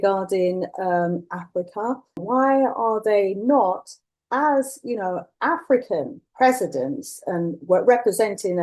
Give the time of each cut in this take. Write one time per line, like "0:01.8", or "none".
0:02.2
0:06.2